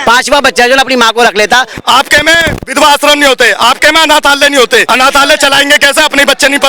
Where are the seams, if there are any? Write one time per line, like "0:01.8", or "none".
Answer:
0:01.7
0:04.9